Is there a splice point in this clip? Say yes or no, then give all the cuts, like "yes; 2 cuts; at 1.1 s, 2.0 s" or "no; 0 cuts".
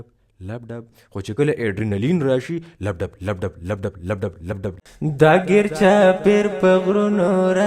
yes; 1 cut; at 4.8 s